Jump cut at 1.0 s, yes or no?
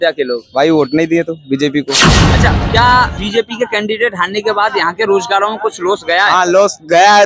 no